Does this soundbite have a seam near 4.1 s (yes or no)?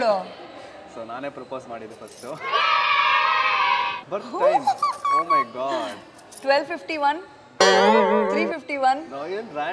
yes